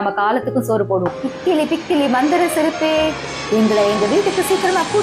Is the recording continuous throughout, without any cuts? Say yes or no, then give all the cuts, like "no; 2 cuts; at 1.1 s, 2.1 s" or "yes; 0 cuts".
no; 1 cut; at 1.2 s